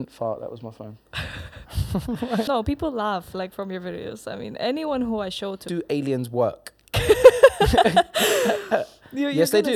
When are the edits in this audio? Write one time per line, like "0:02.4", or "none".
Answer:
0:02.5
0:05.6